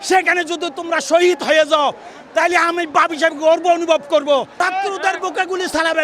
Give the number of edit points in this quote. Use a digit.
1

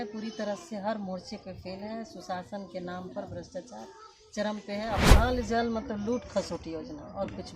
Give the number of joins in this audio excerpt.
1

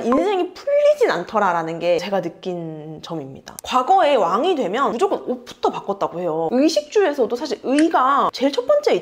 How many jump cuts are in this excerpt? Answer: 0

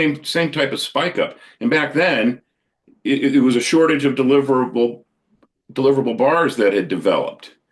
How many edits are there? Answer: 0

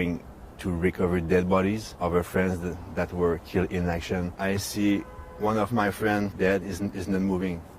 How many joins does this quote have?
3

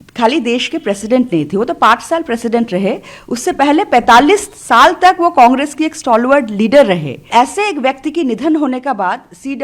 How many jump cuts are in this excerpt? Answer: 1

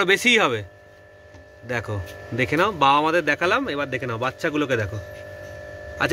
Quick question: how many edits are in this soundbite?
0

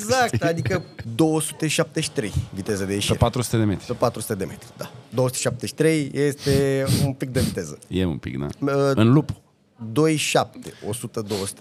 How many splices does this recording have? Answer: 1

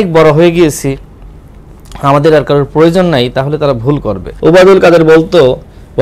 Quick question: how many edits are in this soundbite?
1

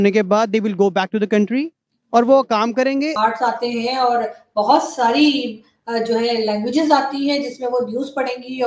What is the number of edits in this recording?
1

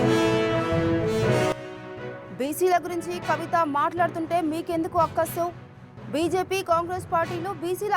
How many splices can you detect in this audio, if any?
1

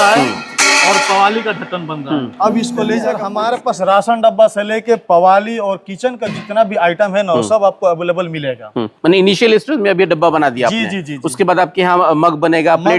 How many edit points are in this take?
1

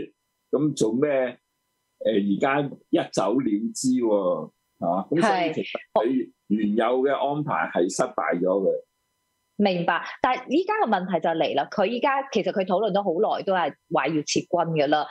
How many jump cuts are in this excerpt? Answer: 0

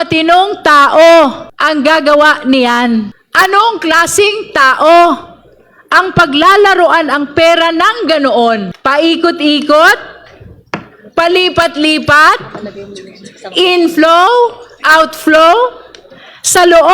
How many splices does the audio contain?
3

